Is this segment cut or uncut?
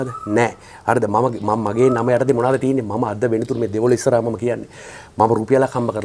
uncut